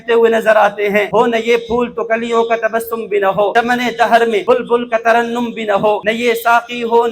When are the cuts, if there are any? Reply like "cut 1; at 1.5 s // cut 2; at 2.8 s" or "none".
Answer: cut 1; at 1.1 s // cut 2; at 3.5 s // cut 3; at 4.4 s // cut 4; at 6.0 s